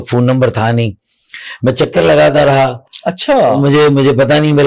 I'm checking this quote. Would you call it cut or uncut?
uncut